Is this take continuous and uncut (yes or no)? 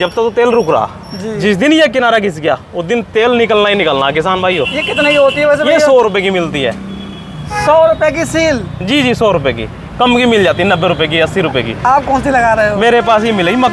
yes